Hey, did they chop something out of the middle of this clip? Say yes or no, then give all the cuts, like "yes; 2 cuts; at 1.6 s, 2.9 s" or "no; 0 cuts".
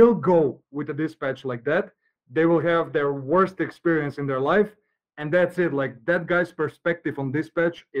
no; 0 cuts